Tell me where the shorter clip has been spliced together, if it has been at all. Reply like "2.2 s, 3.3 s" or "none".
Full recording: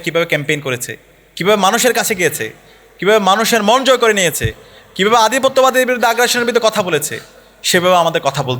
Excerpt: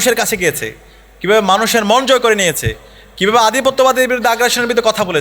none